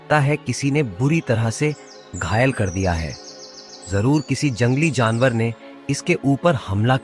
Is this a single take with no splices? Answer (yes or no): yes